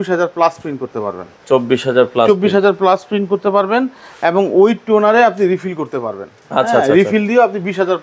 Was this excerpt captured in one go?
yes; 0 cuts

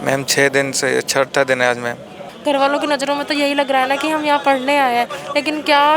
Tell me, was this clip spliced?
yes; 1 cut; at 2.3 s

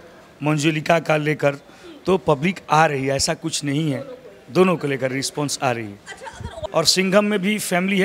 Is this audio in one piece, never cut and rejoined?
no; 1 cut; at 6.5 s

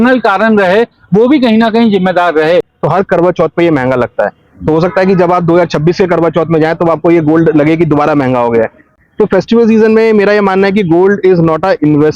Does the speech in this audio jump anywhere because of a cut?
yes; 2 cuts; at 2.7 s, 8.9 s

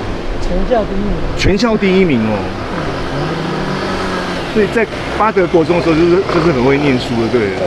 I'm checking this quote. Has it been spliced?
no; 0 cuts

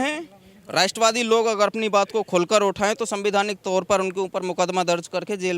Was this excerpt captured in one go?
yes; 0 cuts

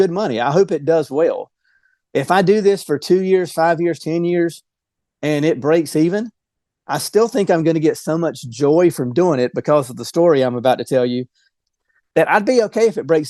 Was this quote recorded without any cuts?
no; 1 cut; at 11.6 s

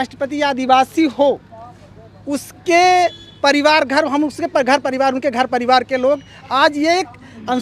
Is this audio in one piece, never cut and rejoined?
yes; 0 cuts

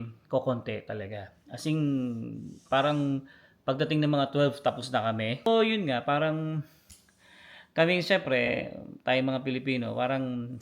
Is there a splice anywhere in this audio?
yes; 1 cut; at 5.5 s

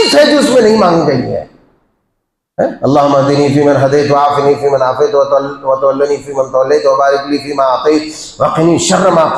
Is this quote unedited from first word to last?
yes; 0 cuts

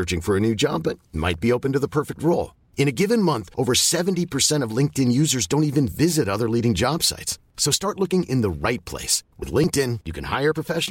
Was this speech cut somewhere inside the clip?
no; 0 cuts

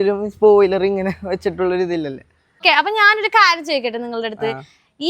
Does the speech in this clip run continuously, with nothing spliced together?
no; 1 cut; at 2.6 s

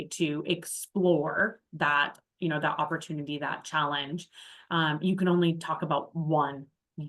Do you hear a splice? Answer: no; 0 cuts

